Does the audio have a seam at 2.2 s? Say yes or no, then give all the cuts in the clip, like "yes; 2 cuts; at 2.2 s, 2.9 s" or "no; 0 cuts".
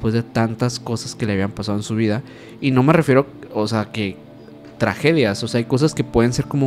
no; 0 cuts